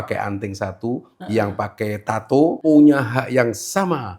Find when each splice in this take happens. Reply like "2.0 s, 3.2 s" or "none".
2.6 s